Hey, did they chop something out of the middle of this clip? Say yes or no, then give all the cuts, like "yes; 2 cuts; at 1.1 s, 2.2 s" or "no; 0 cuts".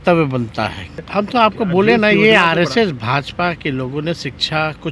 yes; 1 cut; at 1.0 s